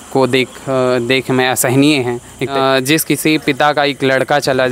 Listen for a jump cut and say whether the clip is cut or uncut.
cut